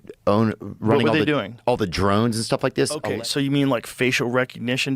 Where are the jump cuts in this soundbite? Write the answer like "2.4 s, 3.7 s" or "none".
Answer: none